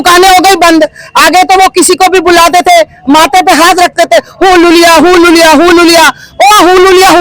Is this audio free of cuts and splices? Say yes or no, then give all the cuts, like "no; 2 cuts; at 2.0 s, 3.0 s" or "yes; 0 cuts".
yes; 0 cuts